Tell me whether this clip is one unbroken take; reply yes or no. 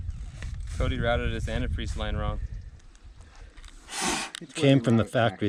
yes